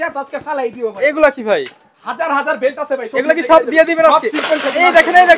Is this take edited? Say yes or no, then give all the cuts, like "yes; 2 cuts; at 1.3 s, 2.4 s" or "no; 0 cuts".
no; 0 cuts